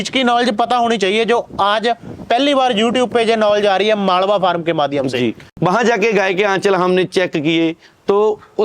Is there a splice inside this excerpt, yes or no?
yes